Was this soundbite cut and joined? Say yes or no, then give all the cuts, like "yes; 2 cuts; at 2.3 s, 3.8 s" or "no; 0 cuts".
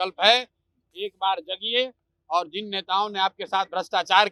no; 0 cuts